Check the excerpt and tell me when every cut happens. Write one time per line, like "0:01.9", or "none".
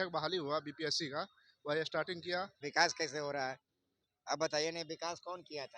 0:02.6